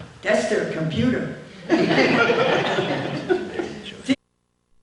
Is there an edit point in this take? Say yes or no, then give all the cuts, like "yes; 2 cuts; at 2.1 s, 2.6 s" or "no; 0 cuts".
no; 0 cuts